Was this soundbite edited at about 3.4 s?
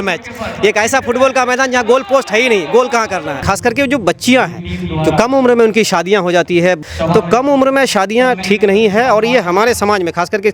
yes; 2 cuts; at 3.4 s, 6.8 s

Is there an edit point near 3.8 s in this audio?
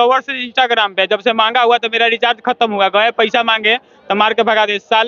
no; 0 cuts

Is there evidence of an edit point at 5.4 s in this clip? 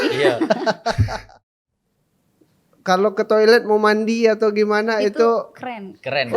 no; 1 cut; at 1.4 s

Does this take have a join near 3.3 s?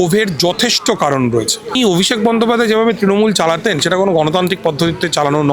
no; 1 cut; at 1.8 s

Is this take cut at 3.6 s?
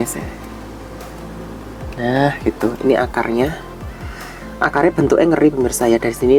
no; 0 cuts

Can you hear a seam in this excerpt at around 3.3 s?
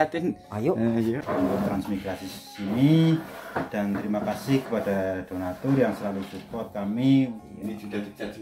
no; 2 cuts; at 1.2 s, 7.4 s

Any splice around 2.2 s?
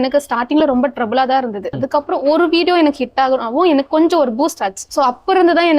no; 1 cut; at 4.8 s

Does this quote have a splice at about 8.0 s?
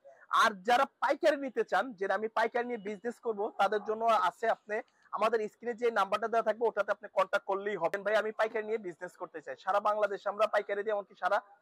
yes; 1 cut; at 8.0 s

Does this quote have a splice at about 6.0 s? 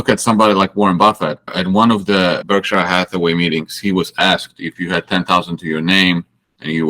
no; 2 cuts; at 1.5 s, 2.4 s

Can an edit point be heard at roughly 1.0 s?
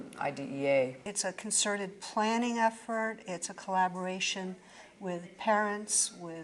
yes; 1 cut; at 1.0 s

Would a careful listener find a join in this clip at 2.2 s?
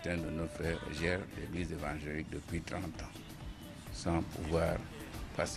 no; 1 cut; at 3.7 s

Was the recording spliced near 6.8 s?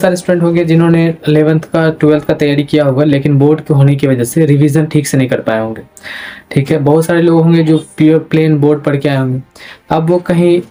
no; 0 cuts

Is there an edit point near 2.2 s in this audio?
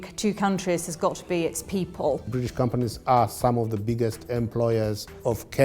yes; 1 cut; at 2.2 s

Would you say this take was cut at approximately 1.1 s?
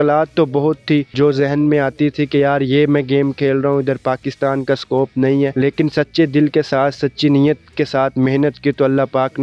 yes; 2 cuts; at 1.1 s, 5.5 s

